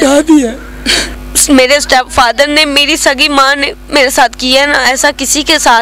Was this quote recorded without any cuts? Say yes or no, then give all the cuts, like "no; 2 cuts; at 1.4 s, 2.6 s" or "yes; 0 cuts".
no; 1 cut; at 1.3 s